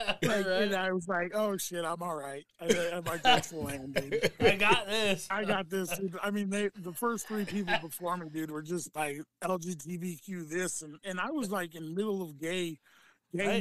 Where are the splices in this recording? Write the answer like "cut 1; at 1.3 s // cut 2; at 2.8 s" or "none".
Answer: cut 1; at 5.3 s // cut 2; at 8.9 s